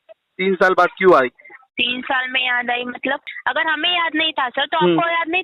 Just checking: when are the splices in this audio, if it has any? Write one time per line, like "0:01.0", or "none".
0:03.3